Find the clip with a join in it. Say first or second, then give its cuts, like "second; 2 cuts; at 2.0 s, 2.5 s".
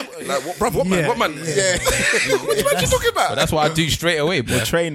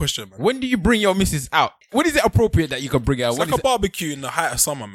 second; 1 cut; at 1.9 s